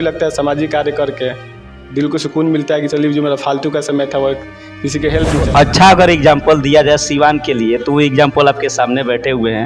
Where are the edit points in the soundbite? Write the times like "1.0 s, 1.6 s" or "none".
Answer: 5.5 s